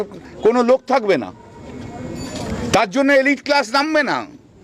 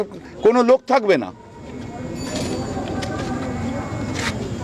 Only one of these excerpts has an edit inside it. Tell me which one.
first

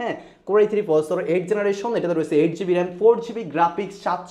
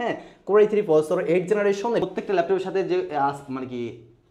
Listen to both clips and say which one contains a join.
second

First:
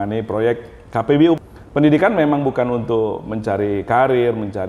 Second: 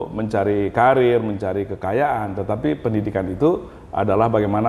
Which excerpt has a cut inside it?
first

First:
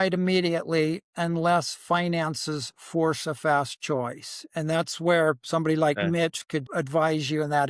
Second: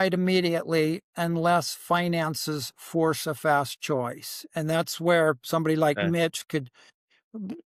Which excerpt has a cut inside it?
first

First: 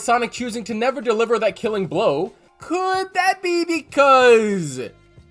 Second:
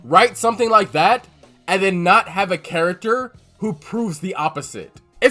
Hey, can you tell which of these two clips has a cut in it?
first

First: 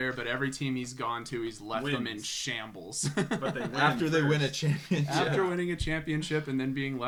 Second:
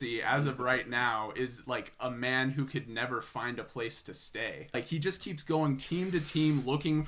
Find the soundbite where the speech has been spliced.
second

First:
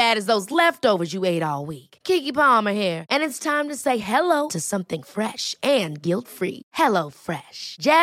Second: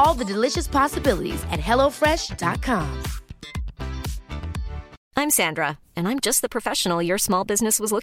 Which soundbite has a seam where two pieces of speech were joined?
second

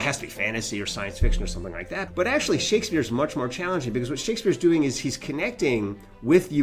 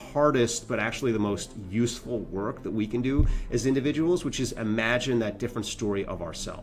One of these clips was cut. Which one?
first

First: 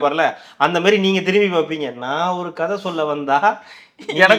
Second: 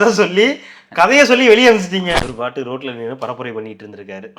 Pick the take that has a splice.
second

